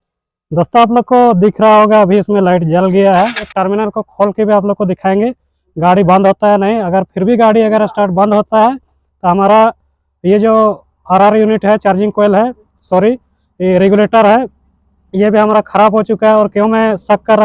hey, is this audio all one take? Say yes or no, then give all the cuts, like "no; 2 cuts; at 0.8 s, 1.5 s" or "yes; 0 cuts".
no; 1 cut; at 3.5 s